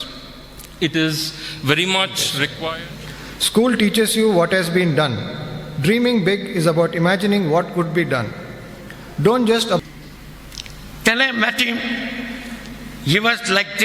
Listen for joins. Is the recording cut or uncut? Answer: cut